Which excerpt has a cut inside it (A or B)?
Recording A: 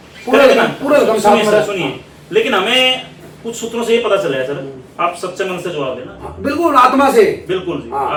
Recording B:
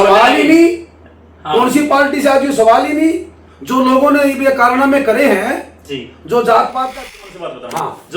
B